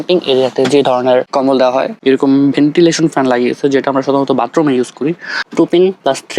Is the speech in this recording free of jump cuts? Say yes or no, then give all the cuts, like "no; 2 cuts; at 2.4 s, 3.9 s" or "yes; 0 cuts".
no; 2 cuts; at 1.9 s, 5.4 s